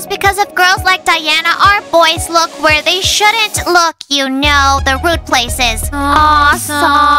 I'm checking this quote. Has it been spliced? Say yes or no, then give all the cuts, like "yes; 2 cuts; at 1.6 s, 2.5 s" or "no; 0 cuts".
no; 0 cuts